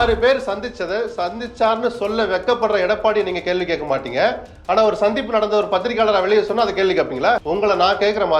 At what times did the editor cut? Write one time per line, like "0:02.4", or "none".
0:07.4